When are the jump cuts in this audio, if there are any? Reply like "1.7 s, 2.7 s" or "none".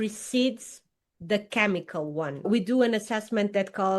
2.5 s